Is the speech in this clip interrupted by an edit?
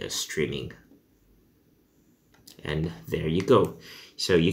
yes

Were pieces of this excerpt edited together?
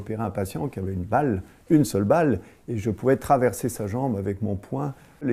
no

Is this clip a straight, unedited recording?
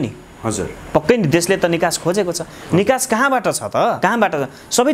no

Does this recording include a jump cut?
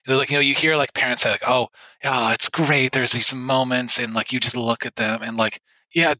no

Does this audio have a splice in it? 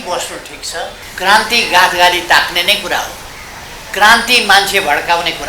yes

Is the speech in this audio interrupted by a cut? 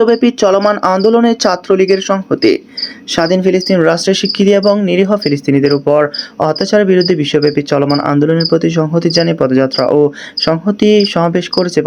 no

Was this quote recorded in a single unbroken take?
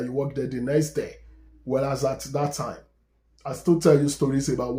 yes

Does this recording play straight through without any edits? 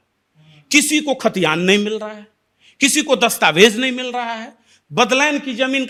yes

